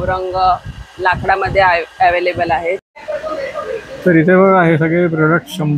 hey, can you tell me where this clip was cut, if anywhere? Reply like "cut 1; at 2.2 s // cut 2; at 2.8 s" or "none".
cut 1; at 2.8 s